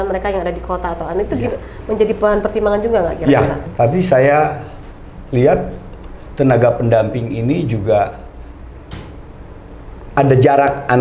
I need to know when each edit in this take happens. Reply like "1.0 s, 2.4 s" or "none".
3.6 s